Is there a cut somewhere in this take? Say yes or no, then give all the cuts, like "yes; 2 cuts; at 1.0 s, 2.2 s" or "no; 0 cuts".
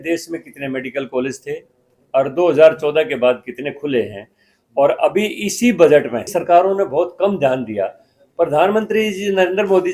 yes; 1 cut; at 6.3 s